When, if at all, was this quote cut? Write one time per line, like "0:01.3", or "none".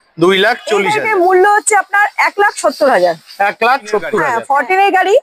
0:00.9
0:04.3